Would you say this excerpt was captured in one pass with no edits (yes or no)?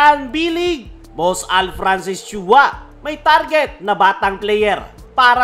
no